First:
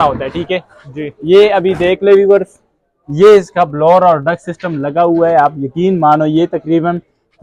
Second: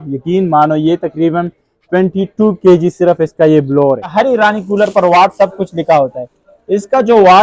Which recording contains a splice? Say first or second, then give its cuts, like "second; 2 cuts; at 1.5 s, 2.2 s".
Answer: second; 1 cut; at 4.1 s